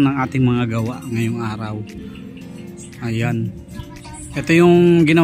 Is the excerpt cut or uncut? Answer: cut